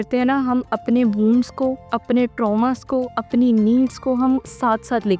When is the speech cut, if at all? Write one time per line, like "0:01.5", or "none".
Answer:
none